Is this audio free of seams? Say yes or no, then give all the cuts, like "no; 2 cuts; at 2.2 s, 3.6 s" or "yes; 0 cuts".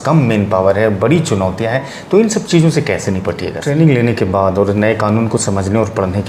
no; 1 cut; at 3.6 s